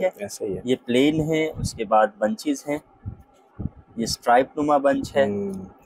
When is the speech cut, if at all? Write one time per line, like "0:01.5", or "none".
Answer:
none

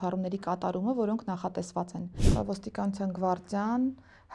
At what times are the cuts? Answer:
0:02.2

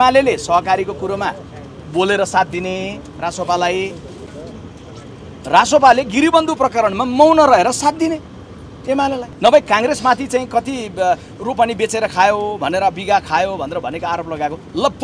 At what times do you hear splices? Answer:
none

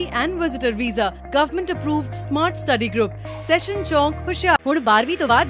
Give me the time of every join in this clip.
0:04.3

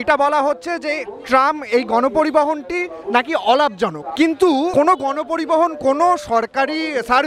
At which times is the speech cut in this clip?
0:04.0

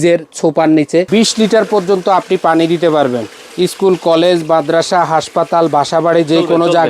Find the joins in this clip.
0:01.1

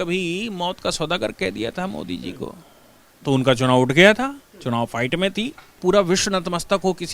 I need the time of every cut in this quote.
0:05.8

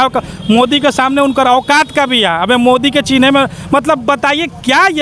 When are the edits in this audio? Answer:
none

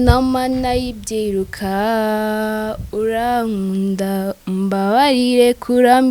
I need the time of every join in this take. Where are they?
none

